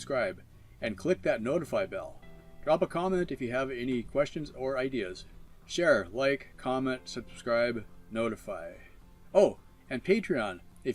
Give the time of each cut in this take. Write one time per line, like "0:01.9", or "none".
none